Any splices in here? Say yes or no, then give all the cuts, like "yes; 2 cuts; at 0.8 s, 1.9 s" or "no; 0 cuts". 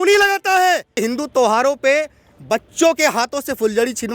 yes; 1 cut; at 0.9 s